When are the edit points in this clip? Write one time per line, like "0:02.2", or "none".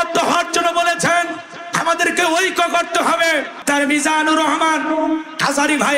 0:03.6